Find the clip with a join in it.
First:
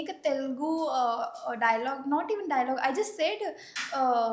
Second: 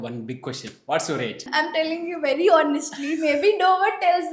second; 1 cut; at 1.5 s

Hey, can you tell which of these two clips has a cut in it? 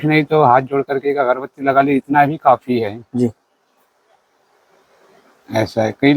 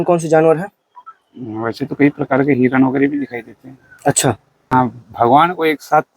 second; 1 cut; at 4.7 s

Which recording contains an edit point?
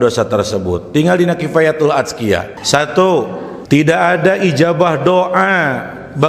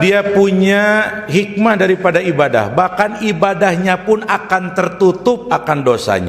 first; 2 cuts; at 2.5 s, 3.5 s

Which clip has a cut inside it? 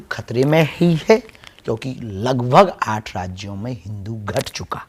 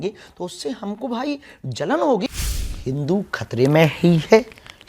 second; 1 cut; at 2.3 s

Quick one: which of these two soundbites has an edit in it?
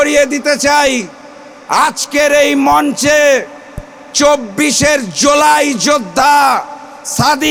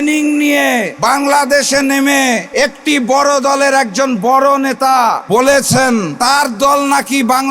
second; 4 cuts; at 0.9 s, 2.5 s, 5.2 s, 6.1 s

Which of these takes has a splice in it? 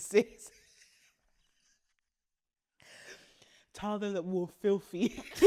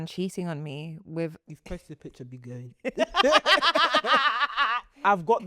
second; 1 cut; at 1.4 s

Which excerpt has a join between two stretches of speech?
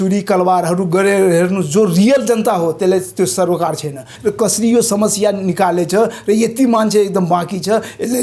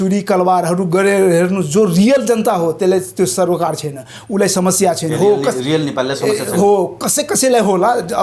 first; 1 cut; at 4.1 s

